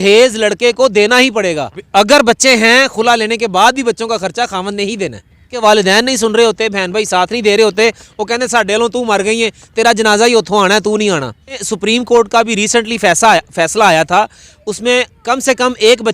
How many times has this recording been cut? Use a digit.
3